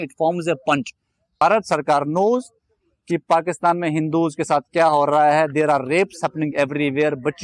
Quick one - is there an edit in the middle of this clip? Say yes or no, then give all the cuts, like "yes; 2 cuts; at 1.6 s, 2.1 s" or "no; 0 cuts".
yes; 1 cut; at 1.4 s